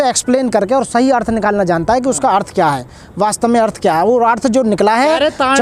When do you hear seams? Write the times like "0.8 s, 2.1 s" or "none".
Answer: none